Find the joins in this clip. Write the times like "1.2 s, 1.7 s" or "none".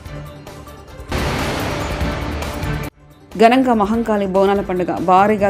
1.1 s, 3.0 s